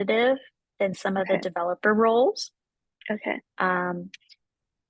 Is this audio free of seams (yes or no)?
yes